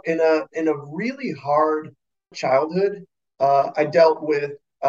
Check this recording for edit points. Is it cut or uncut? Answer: cut